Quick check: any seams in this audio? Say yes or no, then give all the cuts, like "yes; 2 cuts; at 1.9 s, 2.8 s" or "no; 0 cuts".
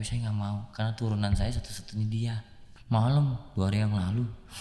yes; 1 cut; at 2.7 s